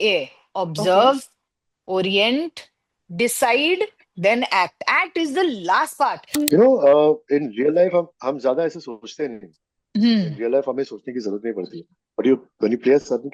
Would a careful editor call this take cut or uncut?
cut